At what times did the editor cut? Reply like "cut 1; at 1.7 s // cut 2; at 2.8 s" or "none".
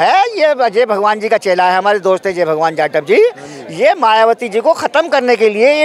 none